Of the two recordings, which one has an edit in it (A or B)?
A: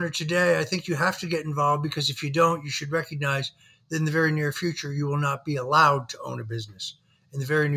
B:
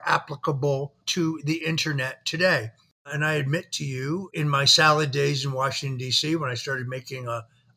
B